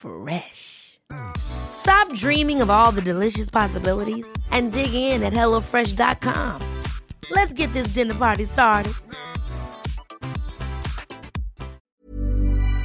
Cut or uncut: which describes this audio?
cut